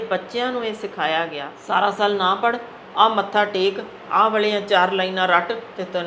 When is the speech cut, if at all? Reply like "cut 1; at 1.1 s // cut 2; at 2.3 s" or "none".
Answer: cut 1; at 1.5 s